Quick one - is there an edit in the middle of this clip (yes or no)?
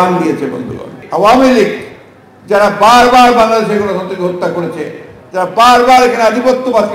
yes